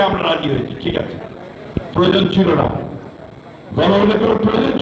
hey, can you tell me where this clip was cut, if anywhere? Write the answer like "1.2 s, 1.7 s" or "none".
none